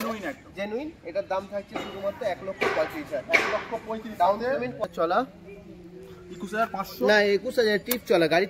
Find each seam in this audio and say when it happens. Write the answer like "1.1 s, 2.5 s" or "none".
4.8 s